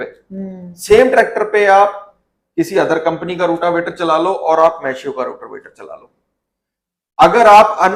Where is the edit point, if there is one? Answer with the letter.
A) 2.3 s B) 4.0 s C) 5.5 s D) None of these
D